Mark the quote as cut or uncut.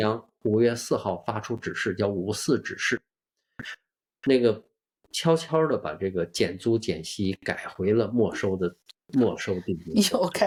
uncut